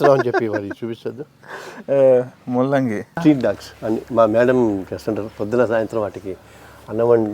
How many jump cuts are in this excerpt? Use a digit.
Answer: 1